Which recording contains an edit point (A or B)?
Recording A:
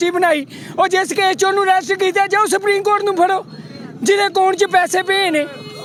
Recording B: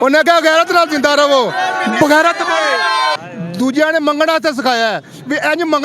B